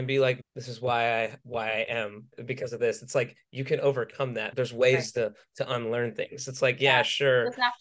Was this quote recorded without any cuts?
no; 2 cuts; at 1.4 s, 2.4 s

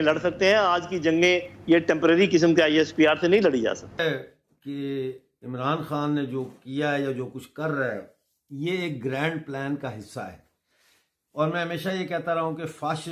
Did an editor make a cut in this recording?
no; 0 cuts

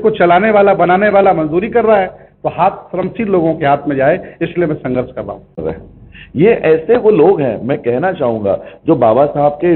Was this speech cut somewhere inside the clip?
yes; 1 cut; at 5.6 s

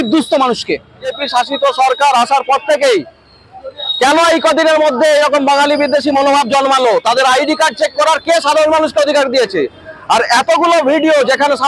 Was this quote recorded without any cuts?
no; 1 cut; at 1.2 s

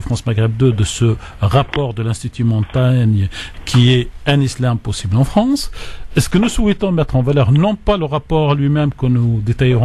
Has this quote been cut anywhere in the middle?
no; 0 cuts

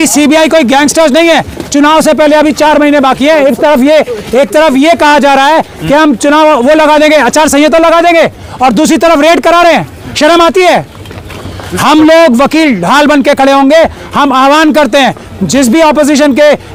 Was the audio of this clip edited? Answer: no; 0 cuts

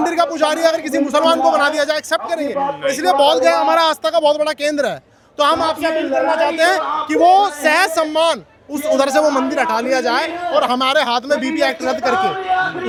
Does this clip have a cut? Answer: no; 0 cuts

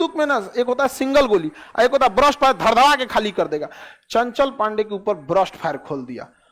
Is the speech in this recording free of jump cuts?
yes; 0 cuts

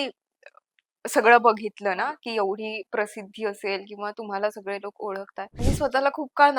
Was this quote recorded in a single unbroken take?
no; 1 cut; at 5.6 s

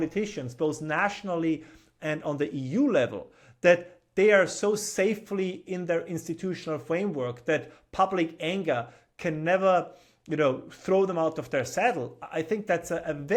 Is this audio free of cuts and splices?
yes; 0 cuts

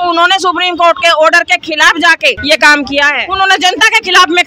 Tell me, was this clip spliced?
yes; 2 cuts; at 2.4 s, 3.2 s

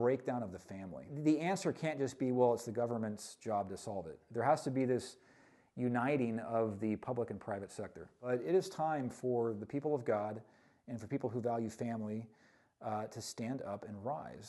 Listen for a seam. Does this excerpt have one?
yes; 2 cuts; at 1.1 s, 8.2 s

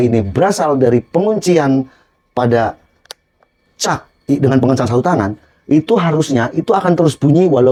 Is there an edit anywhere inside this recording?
no; 0 cuts

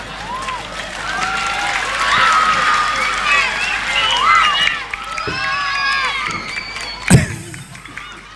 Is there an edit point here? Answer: no; 0 cuts

